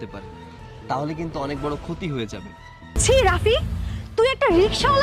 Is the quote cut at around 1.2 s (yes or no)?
no